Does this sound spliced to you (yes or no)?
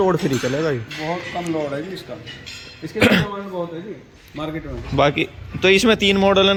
no